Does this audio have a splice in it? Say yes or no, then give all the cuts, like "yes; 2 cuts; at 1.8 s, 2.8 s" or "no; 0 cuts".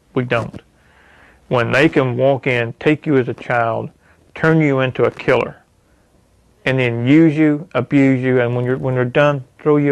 no; 0 cuts